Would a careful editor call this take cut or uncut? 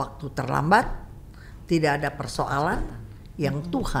uncut